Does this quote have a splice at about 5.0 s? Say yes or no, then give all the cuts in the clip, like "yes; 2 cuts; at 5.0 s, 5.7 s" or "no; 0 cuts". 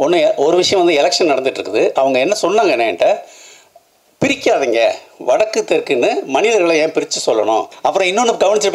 no; 1 cut; at 7.7 s